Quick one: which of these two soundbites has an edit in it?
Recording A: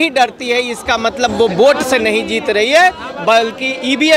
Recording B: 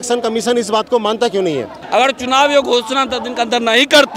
B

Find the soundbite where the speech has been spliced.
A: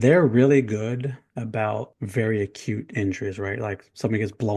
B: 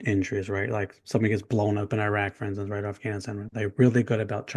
A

